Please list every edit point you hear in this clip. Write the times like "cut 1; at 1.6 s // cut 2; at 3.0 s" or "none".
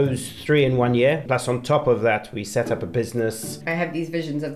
cut 1; at 1.2 s // cut 2; at 3.5 s